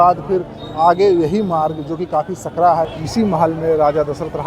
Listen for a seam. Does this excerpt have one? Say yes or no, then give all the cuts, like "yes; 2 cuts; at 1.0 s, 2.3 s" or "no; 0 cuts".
yes; 1 cut; at 2.9 s